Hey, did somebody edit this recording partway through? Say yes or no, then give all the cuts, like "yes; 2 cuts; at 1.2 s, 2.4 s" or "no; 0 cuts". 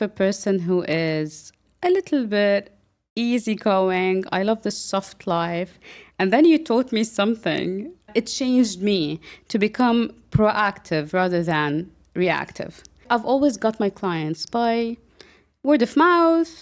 yes; 2 cuts; at 8.1 s, 13.0 s